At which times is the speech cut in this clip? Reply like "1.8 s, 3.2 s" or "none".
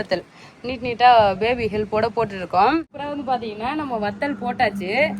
3.0 s